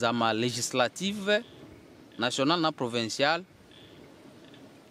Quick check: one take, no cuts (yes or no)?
yes